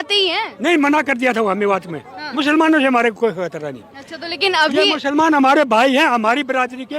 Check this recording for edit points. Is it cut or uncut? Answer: cut